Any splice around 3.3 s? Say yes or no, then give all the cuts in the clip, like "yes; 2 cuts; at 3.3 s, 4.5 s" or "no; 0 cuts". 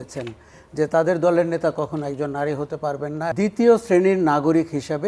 yes; 1 cut; at 3.3 s